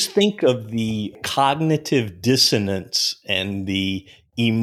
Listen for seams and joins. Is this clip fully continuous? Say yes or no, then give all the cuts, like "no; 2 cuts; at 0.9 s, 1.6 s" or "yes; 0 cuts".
no; 1 cut; at 1.2 s